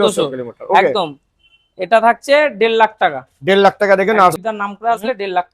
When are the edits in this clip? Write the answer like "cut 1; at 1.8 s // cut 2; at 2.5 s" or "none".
cut 1; at 4.4 s